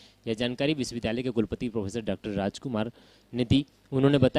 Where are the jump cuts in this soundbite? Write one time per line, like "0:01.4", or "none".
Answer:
0:00.9
0:02.8